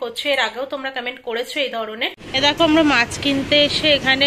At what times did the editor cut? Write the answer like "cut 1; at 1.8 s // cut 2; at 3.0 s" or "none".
cut 1; at 2.2 s